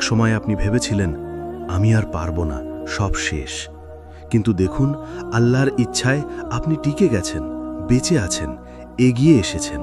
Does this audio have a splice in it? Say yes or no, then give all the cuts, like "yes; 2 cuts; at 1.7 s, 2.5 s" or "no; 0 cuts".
no; 0 cuts